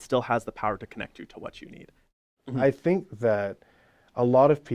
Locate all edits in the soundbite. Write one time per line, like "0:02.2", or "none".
0:02.2